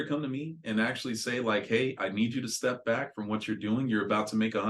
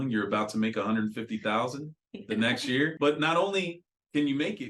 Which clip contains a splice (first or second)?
second